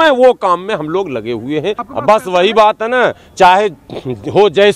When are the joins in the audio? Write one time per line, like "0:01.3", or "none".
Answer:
0:01.8